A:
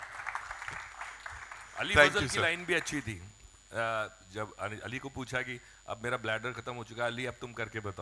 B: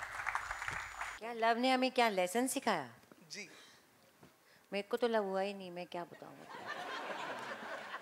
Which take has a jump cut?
B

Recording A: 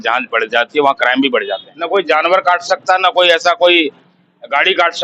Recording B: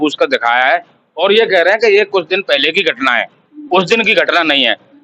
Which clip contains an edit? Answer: A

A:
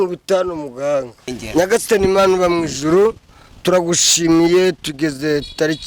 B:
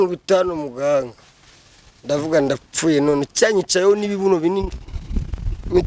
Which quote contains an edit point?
A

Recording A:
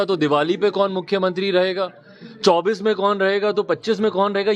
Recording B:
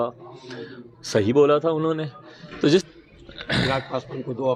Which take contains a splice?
B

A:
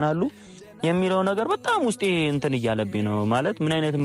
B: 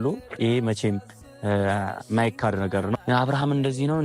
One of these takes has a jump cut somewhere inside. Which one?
B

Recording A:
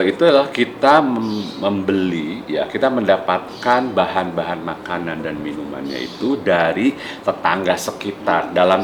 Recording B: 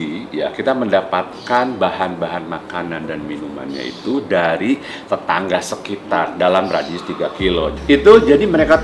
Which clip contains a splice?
B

